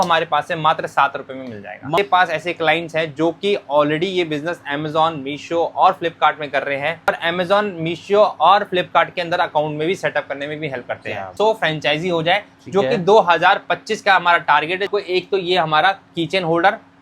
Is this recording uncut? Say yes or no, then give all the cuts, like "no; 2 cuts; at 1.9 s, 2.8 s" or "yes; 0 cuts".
no; 4 cuts; at 2.0 s, 7.1 s, 11.3 s, 14.9 s